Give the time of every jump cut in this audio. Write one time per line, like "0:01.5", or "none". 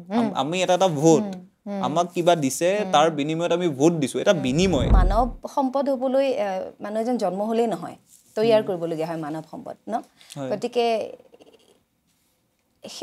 0:05.0

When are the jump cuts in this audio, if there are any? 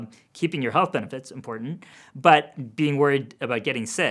0:02.5

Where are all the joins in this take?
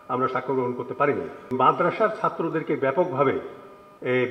0:01.5

